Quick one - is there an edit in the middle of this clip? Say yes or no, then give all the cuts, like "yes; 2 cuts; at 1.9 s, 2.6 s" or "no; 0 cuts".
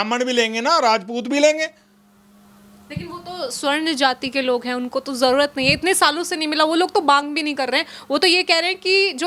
no; 0 cuts